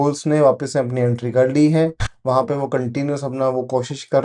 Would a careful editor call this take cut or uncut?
uncut